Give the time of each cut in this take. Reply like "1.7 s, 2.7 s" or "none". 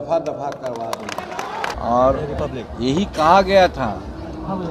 1.7 s

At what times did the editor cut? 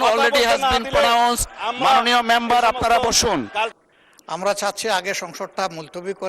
3.7 s

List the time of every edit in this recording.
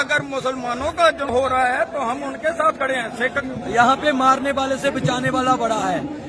1.2 s, 3.4 s

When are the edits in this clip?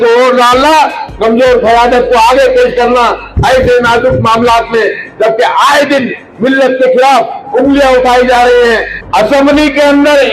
8.9 s

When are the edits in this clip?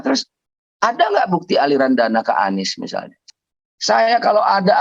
3.3 s

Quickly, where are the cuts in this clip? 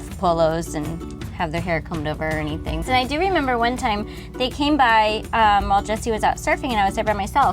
1.2 s, 2.8 s

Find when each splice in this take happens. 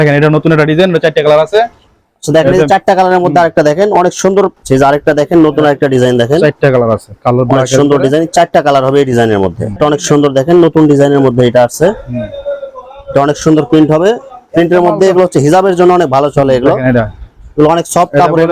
4.6 s, 9.8 s, 14.4 s

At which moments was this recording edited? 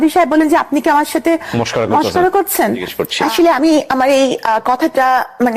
3.0 s

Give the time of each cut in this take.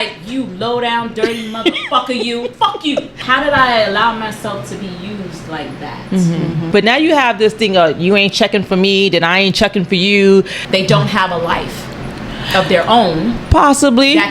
3.1 s, 6.7 s, 10.6 s

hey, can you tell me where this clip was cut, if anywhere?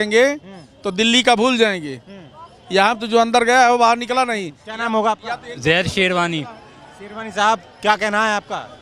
none

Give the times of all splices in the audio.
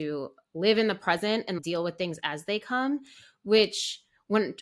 1.6 s

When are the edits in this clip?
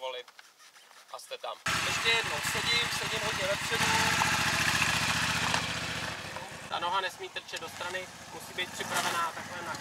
1.6 s, 6.6 s

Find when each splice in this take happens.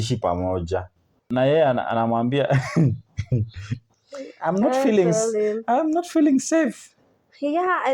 1.2 s

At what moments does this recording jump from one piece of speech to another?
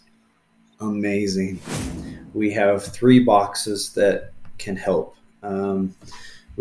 1.6 s

